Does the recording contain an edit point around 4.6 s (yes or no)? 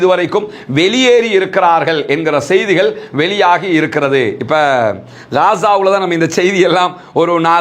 yes